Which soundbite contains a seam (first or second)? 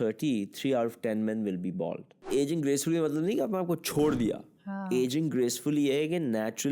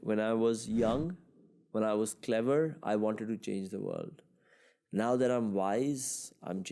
first